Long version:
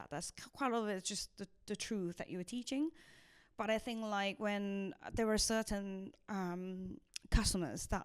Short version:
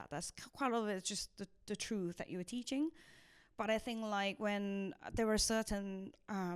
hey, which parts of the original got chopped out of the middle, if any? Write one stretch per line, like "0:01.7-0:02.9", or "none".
none